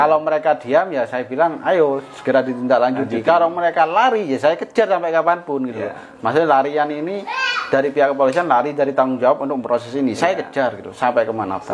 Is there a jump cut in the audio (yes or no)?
no